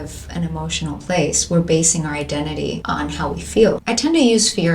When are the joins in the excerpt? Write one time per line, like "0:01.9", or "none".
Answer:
0:02.8
0:03.8